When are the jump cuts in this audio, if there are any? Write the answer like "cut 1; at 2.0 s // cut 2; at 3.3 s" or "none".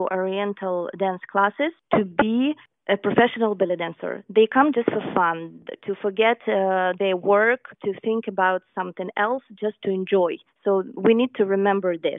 cut 1; at 1.8 s // cut 2; at 2.7 s // cut 3; at 7.7 s // cut 4; at 10.5 s